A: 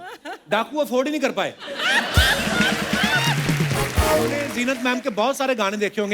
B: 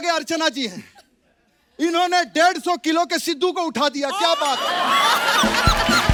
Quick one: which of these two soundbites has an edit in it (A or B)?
A